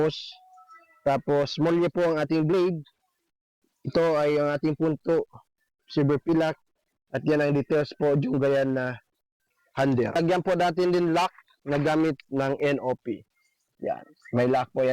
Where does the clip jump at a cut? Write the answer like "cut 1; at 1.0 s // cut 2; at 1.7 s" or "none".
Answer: cut 1; at 10.2 s